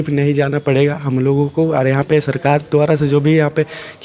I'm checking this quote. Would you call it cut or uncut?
uncut